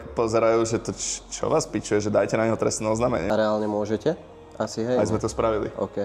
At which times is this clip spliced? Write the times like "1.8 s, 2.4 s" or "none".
none